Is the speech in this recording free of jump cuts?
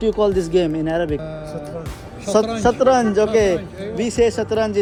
yes; 0 cuts

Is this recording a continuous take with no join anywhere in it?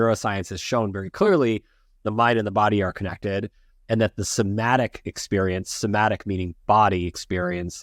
yes; 0 cuts

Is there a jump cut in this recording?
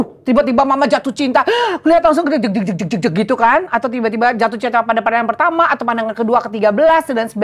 no; 0 cuts

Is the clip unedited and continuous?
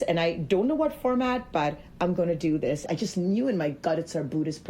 no; 1 cut; at 2.8 s

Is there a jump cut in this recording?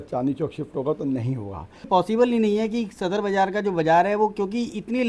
yes; 1 cut; at 1.9 s

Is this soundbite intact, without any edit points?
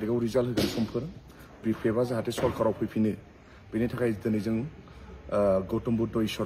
yes; 0 cuts

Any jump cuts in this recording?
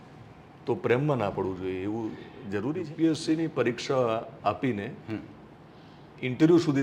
yes; 1 cut; at 2.9 s

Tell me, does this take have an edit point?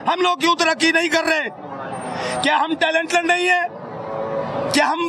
no; 0 cuts

